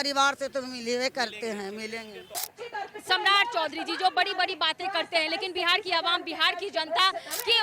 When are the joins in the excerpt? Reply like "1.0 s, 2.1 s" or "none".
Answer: 2.4 s